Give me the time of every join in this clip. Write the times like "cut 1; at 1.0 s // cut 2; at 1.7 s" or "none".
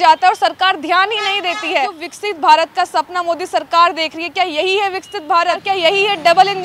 cut 1; at 2.1 s // cut 2; at 5.6 s